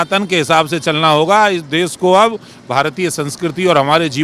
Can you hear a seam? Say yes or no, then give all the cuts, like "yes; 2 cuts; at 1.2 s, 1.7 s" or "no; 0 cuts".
no; 0 cuts